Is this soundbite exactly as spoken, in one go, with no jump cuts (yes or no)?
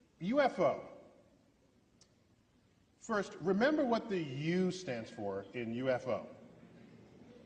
yes